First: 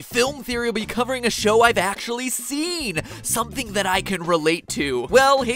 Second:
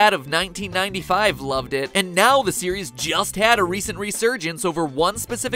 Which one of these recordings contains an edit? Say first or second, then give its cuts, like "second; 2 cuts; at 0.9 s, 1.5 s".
first; 1 cut; at 4.4 s